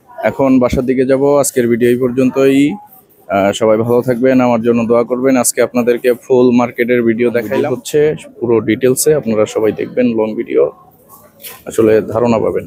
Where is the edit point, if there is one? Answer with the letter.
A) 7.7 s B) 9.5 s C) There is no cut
A